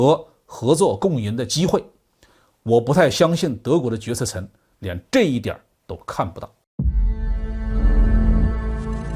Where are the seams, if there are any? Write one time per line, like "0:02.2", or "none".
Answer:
0:06.6